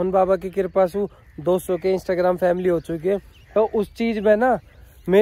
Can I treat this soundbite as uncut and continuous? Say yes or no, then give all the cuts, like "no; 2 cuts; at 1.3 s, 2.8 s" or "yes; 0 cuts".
yes; 0 cuts